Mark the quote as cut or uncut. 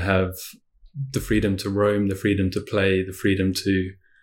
cut